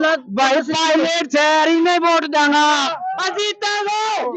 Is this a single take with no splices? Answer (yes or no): yes